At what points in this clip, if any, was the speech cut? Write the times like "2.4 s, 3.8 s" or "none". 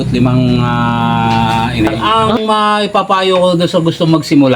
2.0 s